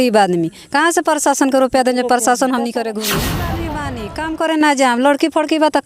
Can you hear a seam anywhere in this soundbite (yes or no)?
yes